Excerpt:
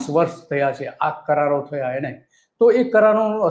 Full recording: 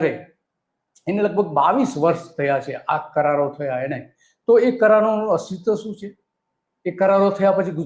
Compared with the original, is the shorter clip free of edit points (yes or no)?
yes